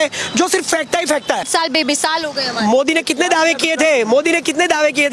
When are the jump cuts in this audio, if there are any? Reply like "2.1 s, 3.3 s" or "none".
1.5 s